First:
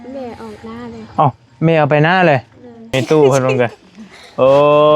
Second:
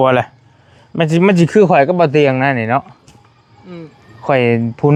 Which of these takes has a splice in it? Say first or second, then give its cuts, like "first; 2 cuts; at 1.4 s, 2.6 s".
first; 1 cut; at 2.9 s